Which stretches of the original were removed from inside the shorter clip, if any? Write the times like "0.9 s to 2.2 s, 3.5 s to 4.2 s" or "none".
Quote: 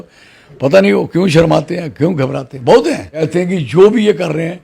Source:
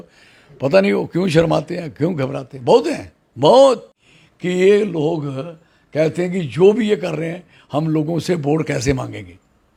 3.3 s to 6.1 s